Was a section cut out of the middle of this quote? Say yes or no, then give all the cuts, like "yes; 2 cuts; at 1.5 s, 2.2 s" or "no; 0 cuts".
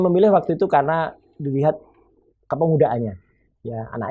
no; 0 cuts